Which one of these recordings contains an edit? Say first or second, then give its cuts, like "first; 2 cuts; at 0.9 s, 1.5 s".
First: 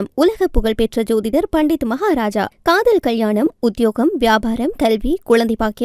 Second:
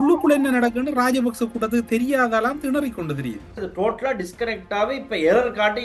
second; 1 cut; at 3.6 s